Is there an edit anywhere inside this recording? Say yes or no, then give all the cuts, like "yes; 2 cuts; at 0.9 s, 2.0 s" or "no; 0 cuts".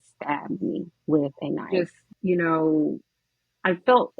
yes; 1 cut; at 1.7 s